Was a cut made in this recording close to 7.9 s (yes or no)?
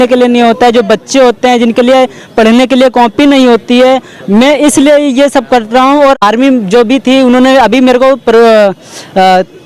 no